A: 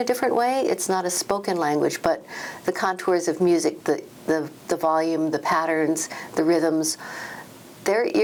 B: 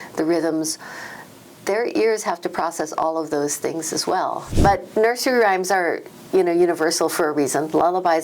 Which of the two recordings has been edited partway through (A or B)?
B